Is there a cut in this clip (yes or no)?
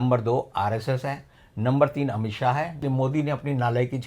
yes